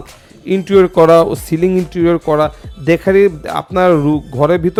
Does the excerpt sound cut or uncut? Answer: uncut